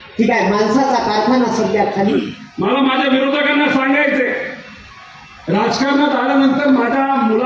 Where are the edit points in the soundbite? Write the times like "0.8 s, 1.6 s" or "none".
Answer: 2.1 s